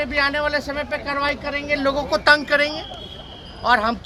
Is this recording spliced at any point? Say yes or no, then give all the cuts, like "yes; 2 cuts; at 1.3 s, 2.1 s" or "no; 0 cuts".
no; 0 cuts